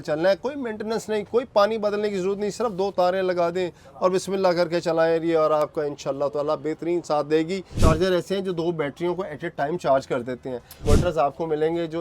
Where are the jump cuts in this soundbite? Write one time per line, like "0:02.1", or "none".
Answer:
0:07.7
0:10.8